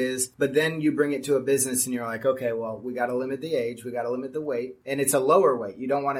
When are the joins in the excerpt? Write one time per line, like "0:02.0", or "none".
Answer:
none

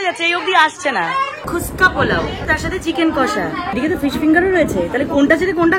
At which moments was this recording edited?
0:01.5
0:02.4
0:03.7

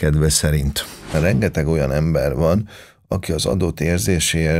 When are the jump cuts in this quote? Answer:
0:01.1

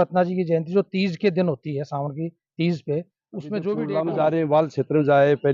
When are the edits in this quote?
0:03.8

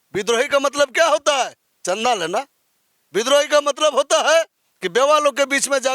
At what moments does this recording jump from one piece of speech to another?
none

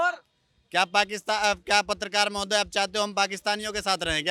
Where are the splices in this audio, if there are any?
none

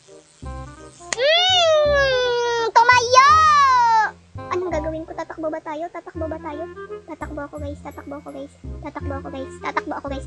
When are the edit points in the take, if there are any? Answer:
0:01.1

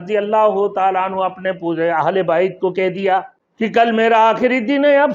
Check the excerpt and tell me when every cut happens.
0:03.4

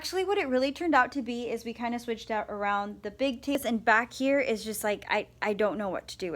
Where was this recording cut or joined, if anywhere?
0:03.6

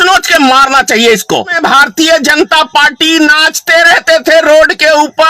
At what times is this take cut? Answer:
0:01.6

